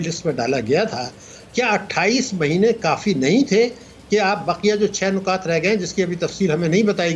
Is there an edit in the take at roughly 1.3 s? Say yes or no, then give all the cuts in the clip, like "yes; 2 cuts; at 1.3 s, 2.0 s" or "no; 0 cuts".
no; 0 cuts